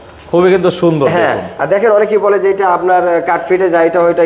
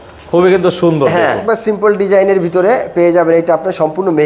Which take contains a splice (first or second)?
second